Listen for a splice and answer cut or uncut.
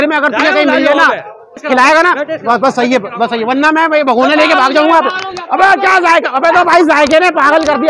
cut